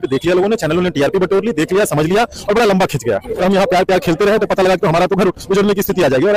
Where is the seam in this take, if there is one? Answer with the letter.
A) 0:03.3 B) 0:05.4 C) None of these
A